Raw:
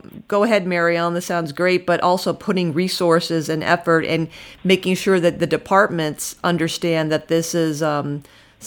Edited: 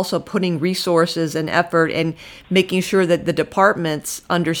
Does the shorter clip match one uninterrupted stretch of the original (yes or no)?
yes